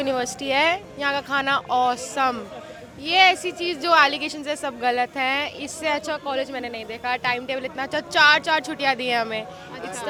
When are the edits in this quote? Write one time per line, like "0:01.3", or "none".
none